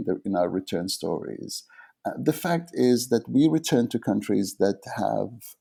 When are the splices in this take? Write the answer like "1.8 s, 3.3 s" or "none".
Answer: none

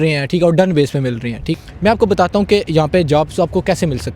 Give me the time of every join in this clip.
1.6 s

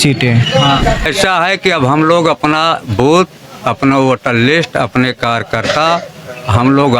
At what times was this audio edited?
1.0 s

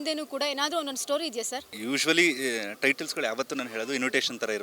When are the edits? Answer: 1.7 s

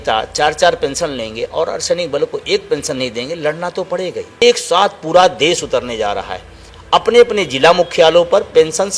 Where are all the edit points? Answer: 4.4 s

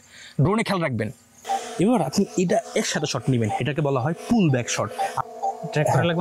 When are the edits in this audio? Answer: 1.3 s, 5.2 s

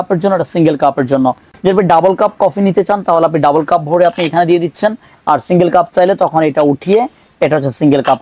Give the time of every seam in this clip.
none

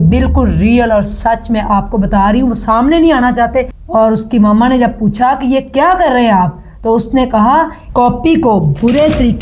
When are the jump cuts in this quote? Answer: 3.8 s, 7.8 s

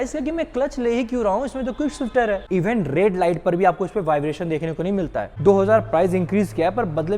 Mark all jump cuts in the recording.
2.4 s, 5.3 s

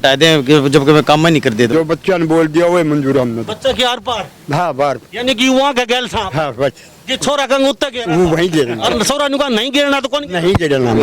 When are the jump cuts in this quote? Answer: 1.7 s

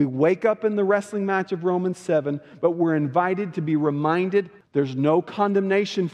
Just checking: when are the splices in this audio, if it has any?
4.5 s

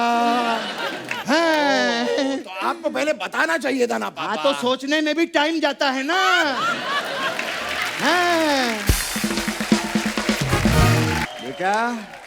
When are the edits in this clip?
11.3 s

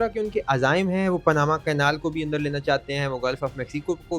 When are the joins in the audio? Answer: none

